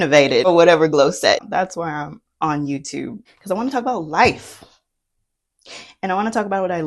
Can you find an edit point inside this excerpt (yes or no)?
yes